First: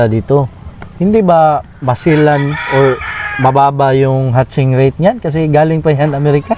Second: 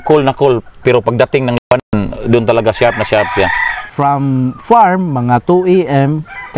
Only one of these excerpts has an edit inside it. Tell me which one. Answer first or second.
second